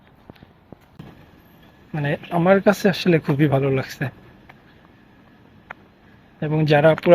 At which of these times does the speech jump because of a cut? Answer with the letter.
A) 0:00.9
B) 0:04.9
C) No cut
A